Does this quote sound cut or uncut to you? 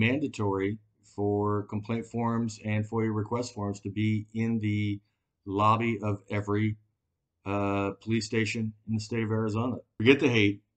cut